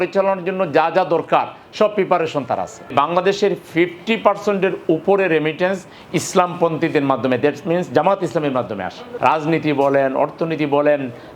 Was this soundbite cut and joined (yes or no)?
yes